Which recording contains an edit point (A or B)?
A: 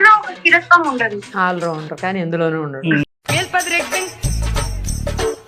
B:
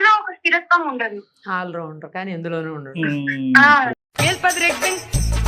A